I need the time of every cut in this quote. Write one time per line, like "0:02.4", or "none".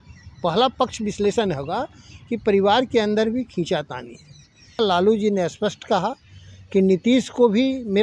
0:04.8